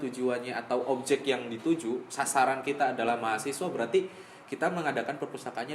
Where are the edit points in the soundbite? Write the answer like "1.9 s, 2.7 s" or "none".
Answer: none